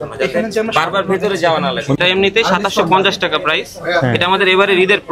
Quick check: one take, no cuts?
no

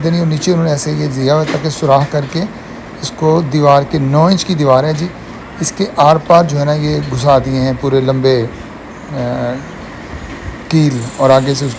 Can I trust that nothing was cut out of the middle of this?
yes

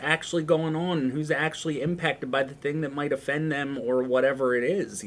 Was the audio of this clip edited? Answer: no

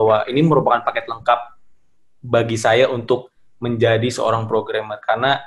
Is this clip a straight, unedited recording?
yes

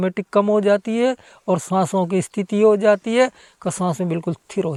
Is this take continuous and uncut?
yes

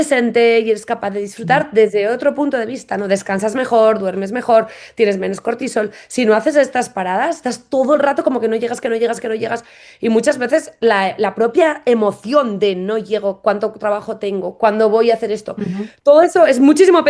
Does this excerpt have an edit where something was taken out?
no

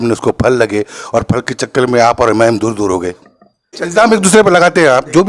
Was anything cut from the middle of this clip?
yes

